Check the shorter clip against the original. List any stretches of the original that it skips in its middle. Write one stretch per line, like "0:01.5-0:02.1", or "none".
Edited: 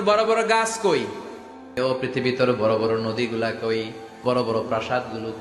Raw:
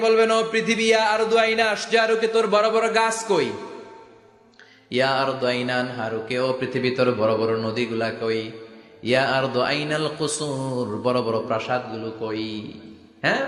0:04.2-0:06.3
0:08.8-0:11.0